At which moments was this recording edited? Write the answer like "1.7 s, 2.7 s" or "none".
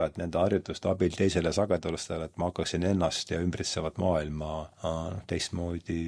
4.7 s